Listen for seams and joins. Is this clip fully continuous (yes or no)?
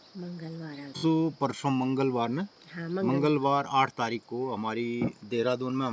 no